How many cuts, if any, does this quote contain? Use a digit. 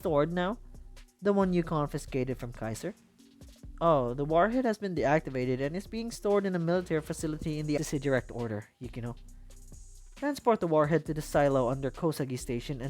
1